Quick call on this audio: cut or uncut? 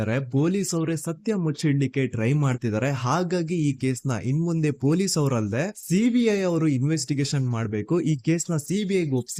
uncut